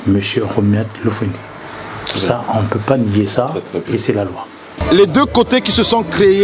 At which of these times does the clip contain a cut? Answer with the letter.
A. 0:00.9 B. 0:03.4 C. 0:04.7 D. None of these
C